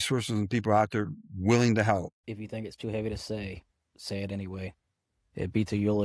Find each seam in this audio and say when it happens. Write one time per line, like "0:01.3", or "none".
0:02.2

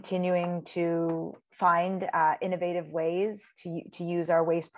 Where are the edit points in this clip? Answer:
0:01.4

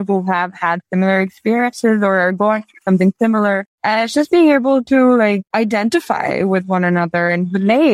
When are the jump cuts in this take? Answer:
0:03.7
0:05.5

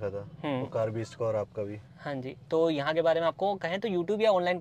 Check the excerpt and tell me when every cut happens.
none

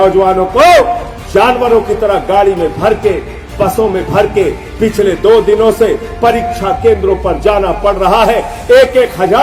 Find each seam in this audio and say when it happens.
none

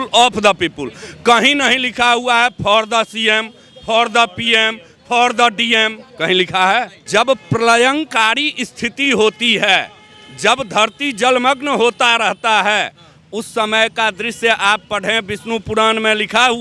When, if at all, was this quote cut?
0:07.0

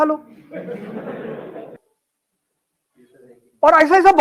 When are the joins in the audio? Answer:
0:01.8

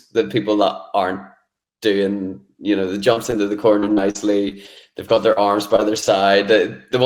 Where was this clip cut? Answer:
none

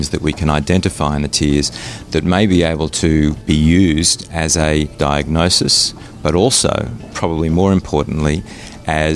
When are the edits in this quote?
0:03.4
0:04.9

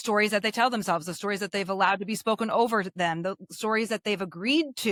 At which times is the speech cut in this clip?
none

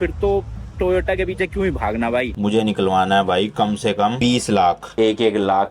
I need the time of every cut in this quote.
0:02.3
0:04.1
0:04.8

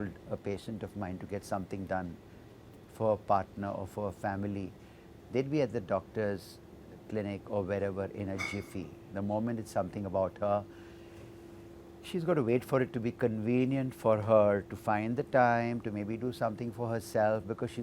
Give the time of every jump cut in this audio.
none

